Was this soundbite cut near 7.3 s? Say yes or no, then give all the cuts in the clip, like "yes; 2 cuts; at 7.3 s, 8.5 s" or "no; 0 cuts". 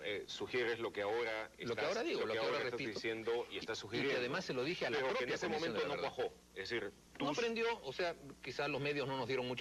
no; 0 cuts